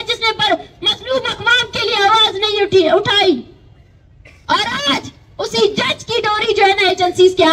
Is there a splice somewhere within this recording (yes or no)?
no